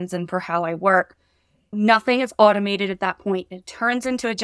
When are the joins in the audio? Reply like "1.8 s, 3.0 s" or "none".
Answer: 1.7 s